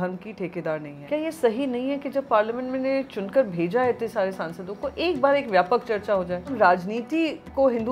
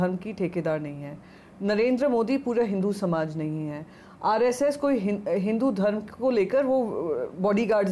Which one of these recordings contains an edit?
first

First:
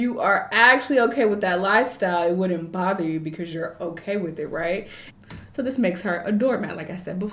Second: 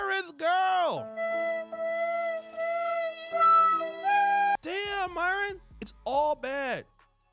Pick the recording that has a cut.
first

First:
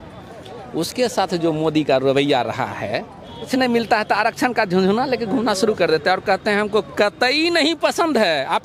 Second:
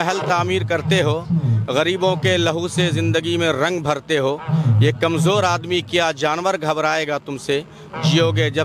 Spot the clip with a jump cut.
first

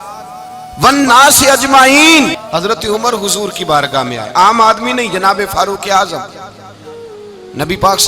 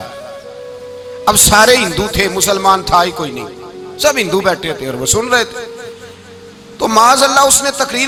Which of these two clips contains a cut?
first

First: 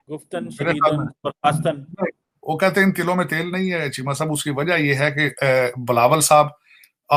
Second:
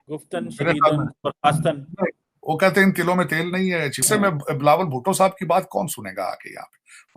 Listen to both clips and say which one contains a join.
second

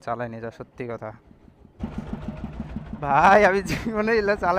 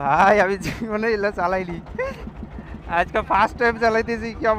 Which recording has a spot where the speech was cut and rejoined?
first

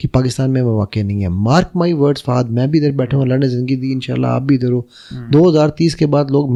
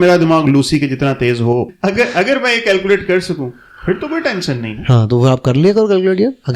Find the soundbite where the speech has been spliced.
second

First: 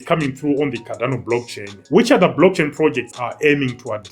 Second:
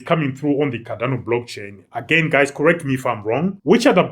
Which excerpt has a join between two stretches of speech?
first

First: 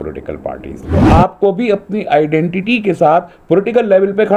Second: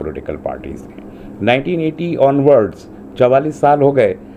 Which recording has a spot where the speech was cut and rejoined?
first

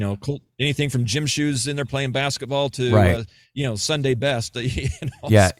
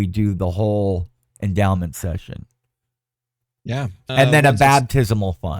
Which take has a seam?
second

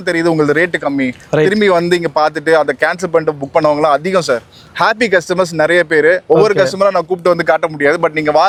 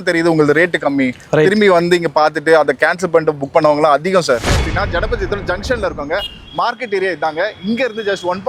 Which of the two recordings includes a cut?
second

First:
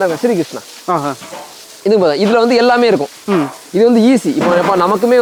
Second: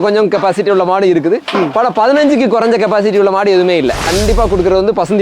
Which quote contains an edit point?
second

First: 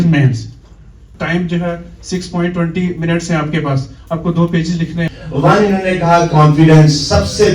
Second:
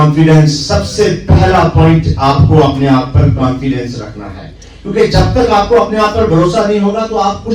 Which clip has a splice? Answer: first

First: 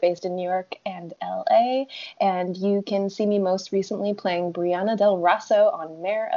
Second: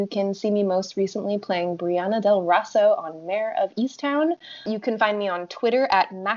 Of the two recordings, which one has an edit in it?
second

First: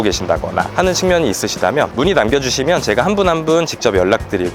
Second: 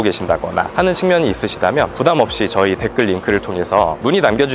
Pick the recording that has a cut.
first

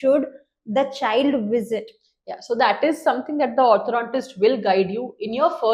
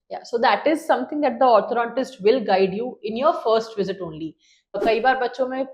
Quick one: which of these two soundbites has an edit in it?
second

